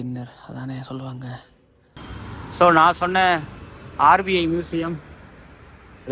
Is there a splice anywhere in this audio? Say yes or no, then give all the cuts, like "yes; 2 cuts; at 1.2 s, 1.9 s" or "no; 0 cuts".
yes; 1 cut; at 2.0 s